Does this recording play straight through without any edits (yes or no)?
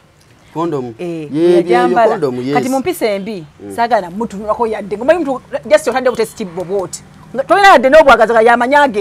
yes